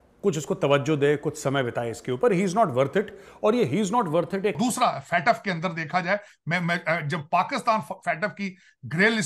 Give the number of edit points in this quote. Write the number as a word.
one